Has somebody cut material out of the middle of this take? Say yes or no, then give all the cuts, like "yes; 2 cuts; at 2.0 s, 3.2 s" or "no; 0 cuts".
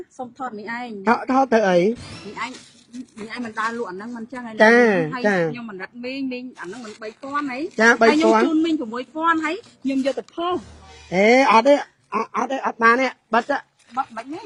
no; 0 cuts